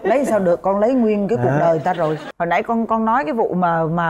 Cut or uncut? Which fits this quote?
cut